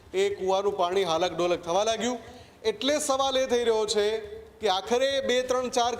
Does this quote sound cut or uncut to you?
uncut